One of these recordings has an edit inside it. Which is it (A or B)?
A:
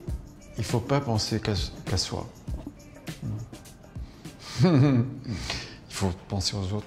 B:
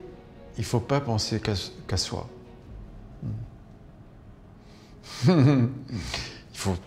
A